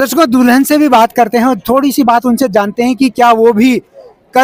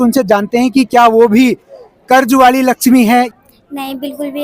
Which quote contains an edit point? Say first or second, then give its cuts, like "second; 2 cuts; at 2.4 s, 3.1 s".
second; 1 cut; at 3.3 s